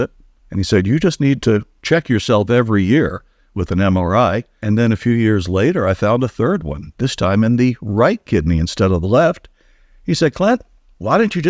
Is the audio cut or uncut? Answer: cut